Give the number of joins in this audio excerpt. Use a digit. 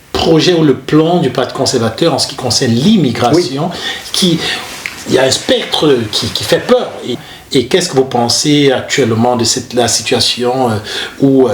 2